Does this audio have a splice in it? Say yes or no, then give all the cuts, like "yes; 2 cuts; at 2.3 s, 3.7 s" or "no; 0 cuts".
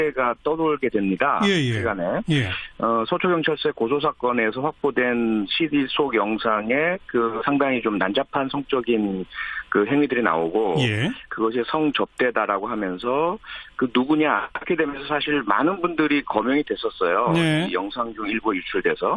no; 0 cuts